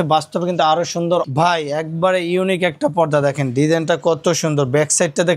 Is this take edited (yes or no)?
yes